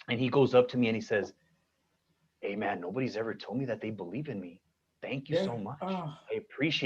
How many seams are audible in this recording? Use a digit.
0